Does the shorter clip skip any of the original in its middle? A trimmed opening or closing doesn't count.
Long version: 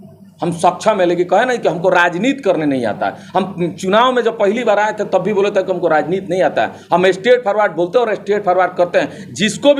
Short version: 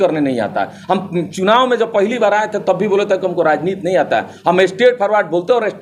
no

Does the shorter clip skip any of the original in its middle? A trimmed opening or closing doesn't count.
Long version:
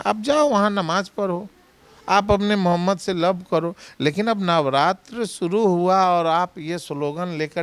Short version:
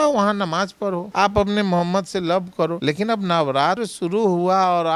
yes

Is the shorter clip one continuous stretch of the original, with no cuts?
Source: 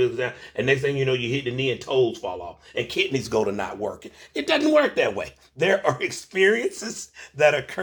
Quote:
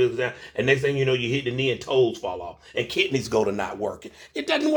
yes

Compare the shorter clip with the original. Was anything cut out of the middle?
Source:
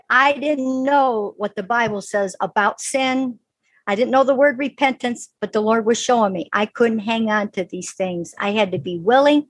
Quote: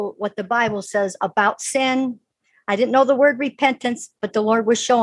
no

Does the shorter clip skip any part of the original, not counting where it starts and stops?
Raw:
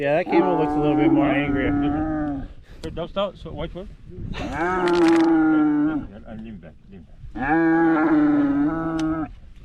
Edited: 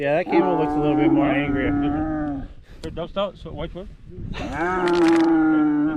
no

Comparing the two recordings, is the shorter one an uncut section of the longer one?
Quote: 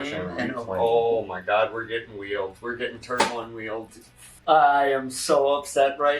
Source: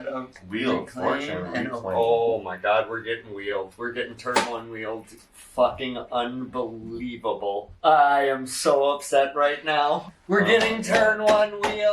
no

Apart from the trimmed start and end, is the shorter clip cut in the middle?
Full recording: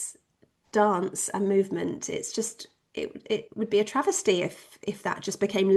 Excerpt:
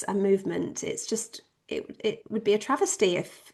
no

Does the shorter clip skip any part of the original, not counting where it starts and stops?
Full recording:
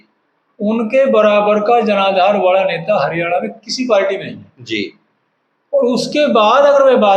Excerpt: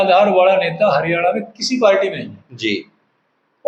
no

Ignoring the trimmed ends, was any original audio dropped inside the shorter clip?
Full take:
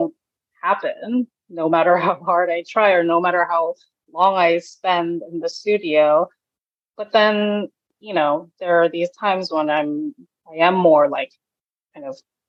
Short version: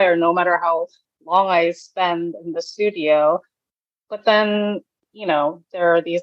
no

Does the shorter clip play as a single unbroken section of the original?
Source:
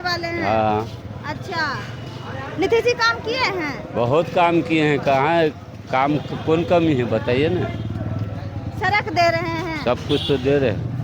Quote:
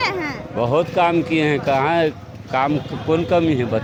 yes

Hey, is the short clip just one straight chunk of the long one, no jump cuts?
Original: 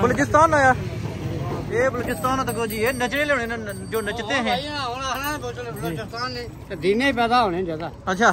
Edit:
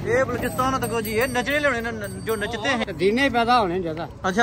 no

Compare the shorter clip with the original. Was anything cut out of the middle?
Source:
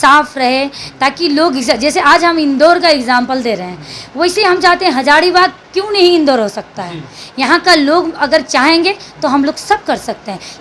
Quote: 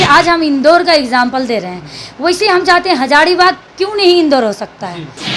no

